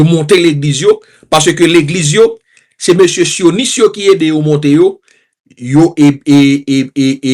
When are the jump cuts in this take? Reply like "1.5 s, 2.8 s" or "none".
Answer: none